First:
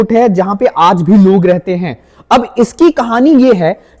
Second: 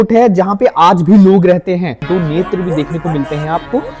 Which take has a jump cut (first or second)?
second